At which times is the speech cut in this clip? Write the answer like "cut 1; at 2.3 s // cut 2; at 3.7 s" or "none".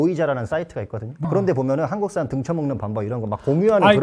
cut 1; at 1.2 s